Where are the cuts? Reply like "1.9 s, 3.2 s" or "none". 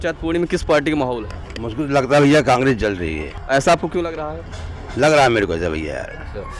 none

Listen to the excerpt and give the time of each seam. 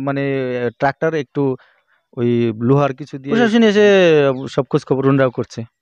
3.1 s

